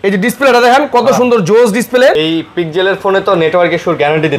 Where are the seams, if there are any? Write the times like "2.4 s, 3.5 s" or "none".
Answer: 2.2 s